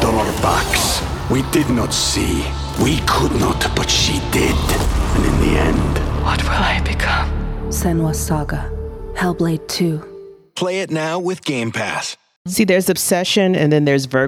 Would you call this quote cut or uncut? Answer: cut